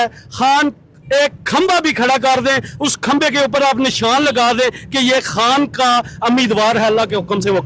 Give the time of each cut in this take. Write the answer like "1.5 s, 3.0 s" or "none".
none

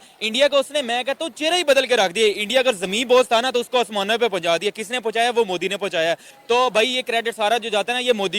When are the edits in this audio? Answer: 6.3 s

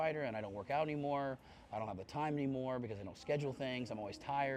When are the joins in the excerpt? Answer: 1.7 s

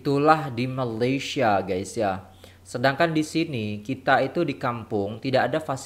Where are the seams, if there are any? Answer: none

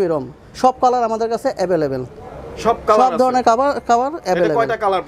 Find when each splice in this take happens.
none

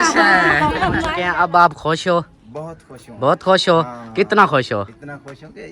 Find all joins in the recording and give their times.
1.2 s

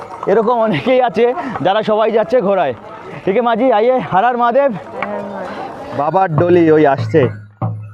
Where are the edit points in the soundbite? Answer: 5.9 s

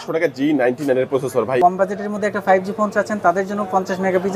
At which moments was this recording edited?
1.6 s

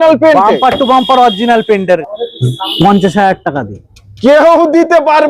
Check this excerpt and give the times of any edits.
2.0 s

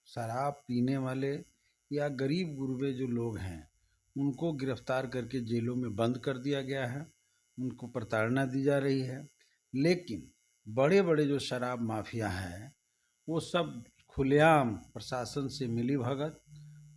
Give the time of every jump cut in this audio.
none

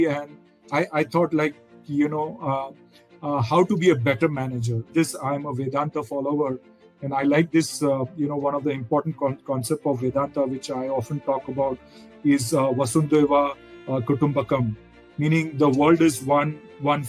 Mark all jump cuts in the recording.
4.9 s

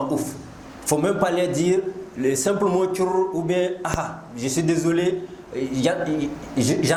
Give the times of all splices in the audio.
none

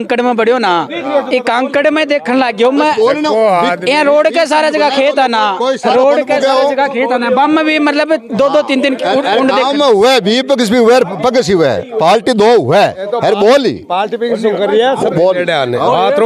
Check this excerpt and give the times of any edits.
none

